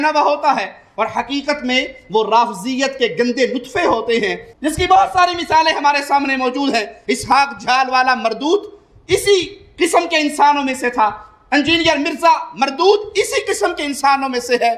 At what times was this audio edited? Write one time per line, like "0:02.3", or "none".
none